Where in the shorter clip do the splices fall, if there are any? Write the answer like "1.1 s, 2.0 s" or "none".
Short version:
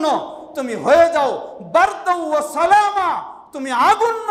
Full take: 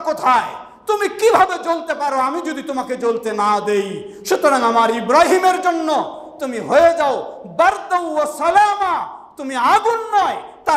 none

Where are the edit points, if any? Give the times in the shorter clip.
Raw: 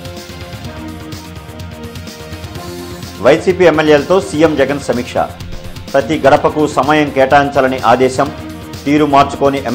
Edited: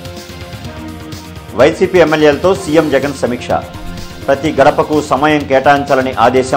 1.5 s

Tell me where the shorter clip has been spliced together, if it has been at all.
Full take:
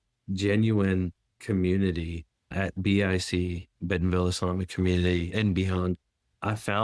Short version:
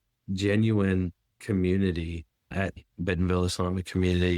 2.8 s

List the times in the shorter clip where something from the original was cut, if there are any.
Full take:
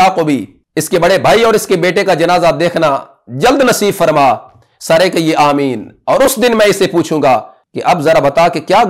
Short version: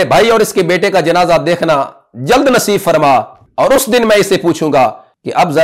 3.4 s

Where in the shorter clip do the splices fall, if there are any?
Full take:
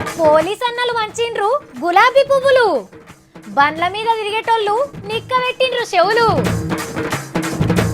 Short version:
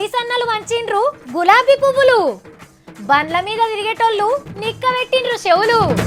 none

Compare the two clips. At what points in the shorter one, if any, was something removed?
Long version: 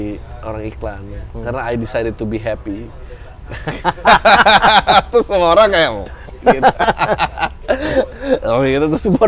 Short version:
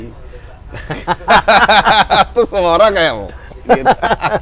none

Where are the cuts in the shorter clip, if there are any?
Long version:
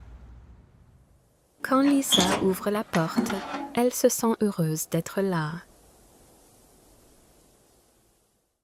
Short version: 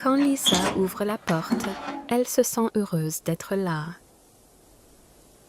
4.0 s

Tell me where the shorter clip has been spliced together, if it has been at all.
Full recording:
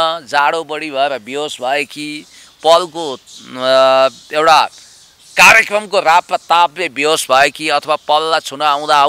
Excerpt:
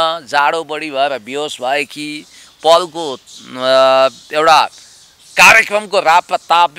none

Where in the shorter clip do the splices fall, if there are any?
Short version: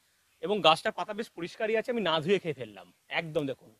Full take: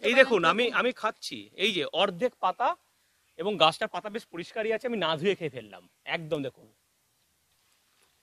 none

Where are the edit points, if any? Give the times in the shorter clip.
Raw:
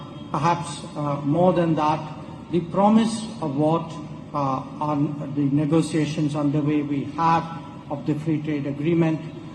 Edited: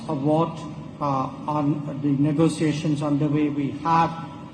none

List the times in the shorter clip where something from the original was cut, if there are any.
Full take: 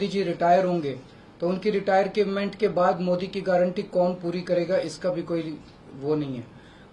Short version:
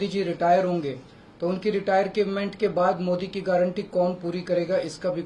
none

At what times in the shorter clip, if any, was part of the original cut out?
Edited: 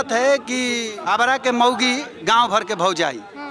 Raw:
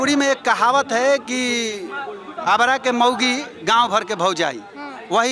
0.9 s

